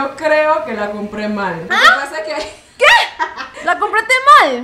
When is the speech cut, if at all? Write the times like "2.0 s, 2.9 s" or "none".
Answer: 1.6 s, 3.5 s